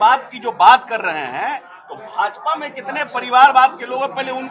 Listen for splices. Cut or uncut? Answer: uncut